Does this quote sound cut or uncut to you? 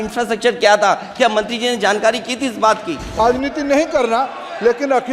cut